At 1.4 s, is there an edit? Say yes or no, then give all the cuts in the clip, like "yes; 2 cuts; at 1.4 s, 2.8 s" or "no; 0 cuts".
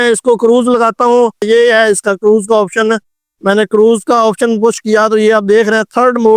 yes; 1 cut; at 1.4 s